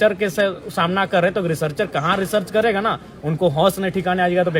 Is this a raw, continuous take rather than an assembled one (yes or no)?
yes